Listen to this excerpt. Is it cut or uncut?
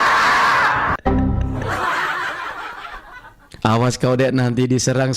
uncut